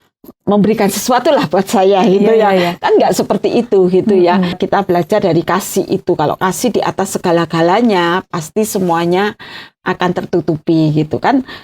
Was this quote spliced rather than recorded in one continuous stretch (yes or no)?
yes